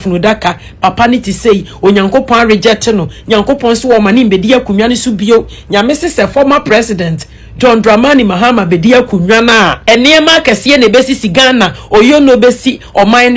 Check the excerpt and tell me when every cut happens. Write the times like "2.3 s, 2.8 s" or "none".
none